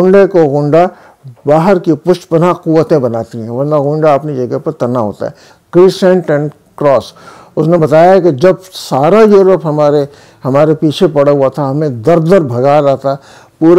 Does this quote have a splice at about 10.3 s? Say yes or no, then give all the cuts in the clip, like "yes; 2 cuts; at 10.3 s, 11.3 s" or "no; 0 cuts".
no; 1 cut; at 5.5 s